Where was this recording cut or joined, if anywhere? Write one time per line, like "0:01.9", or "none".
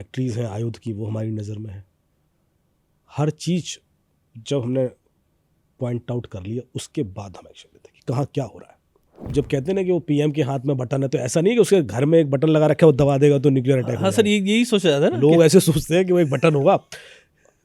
0:09.3